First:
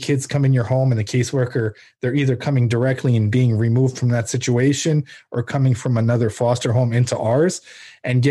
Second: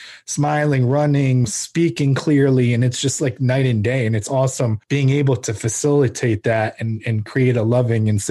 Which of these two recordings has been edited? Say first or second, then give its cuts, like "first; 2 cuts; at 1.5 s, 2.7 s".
second; 2 cuts; at 1.5 s, 4.8 s